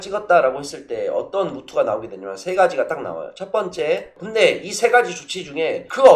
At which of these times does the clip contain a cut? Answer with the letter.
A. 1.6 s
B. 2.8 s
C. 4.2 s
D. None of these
C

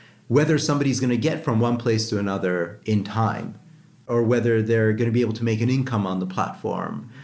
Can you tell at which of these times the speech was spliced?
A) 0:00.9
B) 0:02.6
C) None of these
C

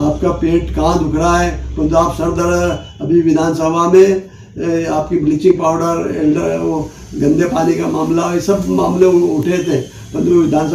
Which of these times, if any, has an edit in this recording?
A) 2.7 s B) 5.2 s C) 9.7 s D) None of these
D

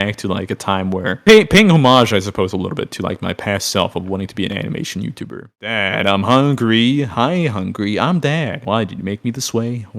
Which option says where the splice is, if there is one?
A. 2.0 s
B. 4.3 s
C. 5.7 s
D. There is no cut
C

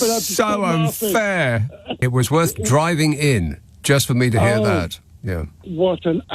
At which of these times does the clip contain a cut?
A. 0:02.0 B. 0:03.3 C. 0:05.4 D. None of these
A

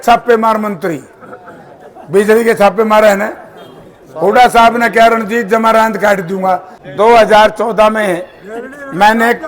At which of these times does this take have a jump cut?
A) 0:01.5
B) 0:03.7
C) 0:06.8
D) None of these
C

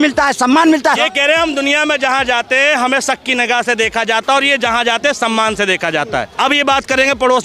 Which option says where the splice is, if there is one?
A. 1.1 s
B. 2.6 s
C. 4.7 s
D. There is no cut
A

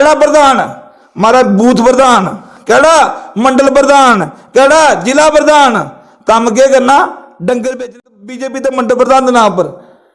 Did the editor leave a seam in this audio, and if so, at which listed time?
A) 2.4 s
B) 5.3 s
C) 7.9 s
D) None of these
C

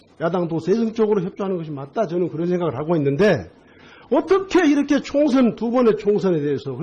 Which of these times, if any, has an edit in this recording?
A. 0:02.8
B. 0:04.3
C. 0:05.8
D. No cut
A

